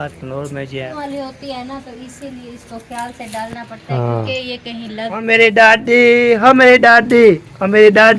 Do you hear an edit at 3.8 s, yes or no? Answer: no